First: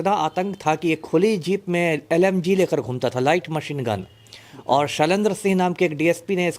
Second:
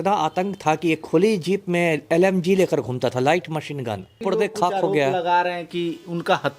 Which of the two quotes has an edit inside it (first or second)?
second